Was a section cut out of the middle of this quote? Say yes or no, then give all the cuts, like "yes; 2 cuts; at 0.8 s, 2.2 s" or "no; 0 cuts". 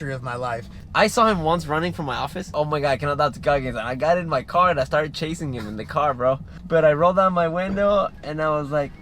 yes; 3 cuts; at 0.9 s, 2.5 s, 6.5 s